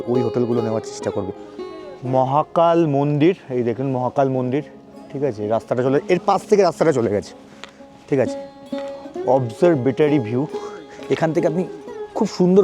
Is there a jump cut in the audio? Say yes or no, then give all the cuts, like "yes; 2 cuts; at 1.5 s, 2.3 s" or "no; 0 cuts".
yes; 1 cut; at 1.5 s